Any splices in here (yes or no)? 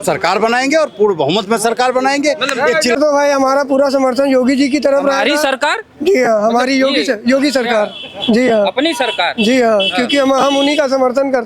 yes